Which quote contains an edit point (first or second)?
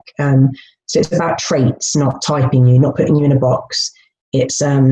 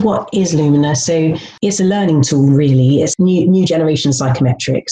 second